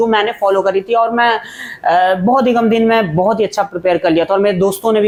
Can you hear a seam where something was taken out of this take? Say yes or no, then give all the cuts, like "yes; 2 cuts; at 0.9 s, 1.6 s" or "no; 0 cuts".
no; 0 cuts